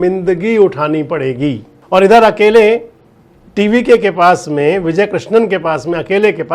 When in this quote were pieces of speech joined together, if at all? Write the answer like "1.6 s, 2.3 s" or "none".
1.7 s